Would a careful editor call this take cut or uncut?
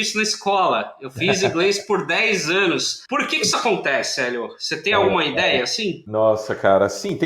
cut